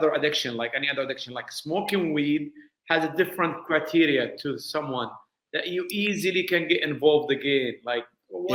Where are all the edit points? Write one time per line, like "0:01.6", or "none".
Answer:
none